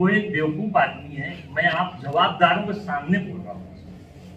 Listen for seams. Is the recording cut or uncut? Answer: uncut